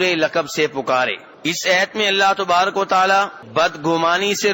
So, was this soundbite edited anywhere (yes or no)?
yes